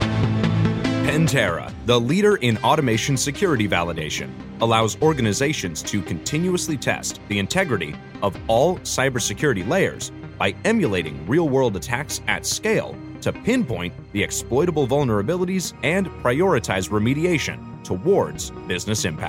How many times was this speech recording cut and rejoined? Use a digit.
1